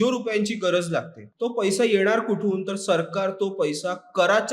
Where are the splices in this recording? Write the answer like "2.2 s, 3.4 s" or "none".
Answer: 1.2 s